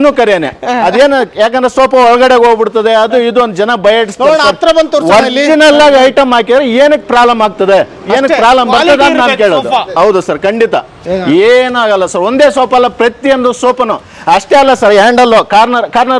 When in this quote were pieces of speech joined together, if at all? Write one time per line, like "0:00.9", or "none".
0:11.0